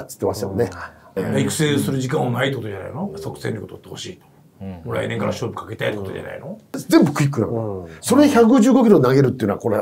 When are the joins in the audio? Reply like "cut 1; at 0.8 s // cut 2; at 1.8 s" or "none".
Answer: cut 1; at 1.2 s // cut 2; at 6.8 s